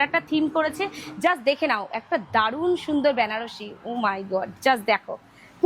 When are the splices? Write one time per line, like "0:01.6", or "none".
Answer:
0:01.0